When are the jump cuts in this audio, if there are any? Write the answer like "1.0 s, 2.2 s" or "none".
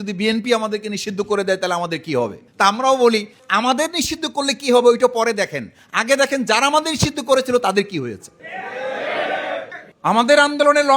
3.4 s, 9.7 s

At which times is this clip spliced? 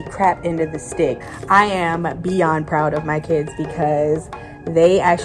1.3 s

